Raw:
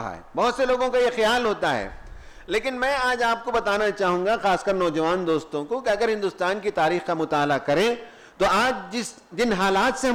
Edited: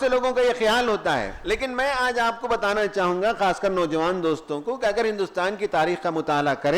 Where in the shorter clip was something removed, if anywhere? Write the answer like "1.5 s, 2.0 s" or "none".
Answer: 1.3 s

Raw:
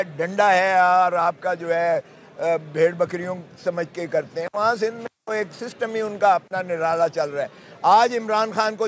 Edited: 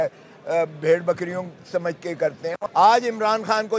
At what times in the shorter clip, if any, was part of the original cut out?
2.6 s

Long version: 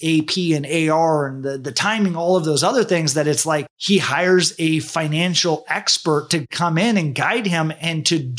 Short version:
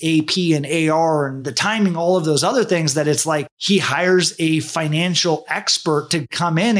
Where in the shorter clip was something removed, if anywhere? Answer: 1.4 s

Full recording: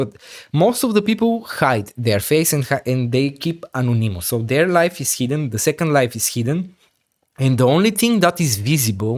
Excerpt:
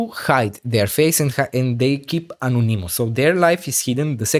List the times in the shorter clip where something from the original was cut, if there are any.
none

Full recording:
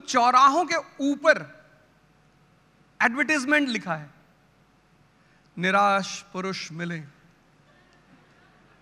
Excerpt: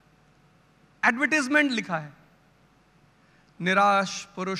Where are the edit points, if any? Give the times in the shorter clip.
none

